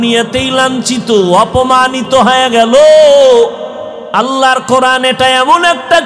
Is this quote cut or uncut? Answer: cut